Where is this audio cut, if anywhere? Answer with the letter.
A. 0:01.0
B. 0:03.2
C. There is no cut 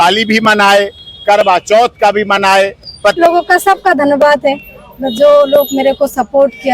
B